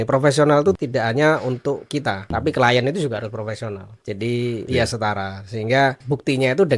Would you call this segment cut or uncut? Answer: cut